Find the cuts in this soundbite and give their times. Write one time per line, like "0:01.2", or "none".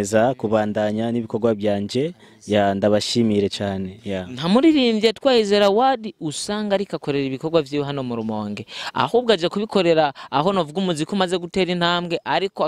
none

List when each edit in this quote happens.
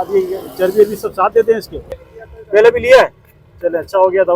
0:02.1

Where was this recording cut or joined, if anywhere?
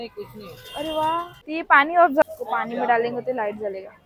0:01.4
0:02.2

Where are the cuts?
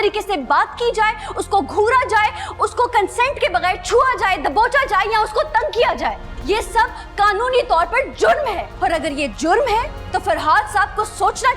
0:06.3
0:08.7
0:10.0

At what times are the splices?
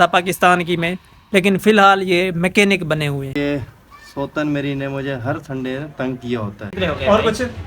0:03.4
0:06.7

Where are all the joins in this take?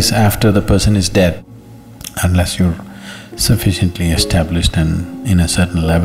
0:01.4

